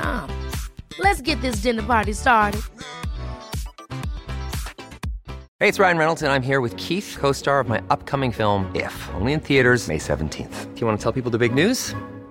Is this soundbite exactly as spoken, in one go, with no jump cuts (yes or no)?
no